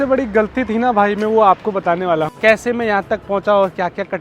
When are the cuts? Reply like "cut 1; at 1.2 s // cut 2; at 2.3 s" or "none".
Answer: cut 1; at 2.3 s